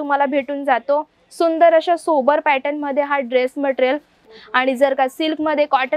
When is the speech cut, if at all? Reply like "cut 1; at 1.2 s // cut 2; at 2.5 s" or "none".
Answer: cut 1; at 4.3 s